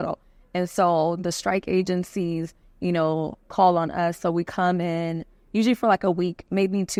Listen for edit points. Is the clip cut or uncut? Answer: uncut